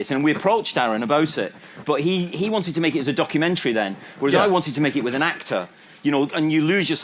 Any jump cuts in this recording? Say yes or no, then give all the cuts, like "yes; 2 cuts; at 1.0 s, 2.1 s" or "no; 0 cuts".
yes; 1 cut; at 1.5 s